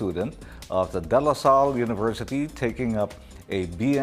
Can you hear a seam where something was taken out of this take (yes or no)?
yes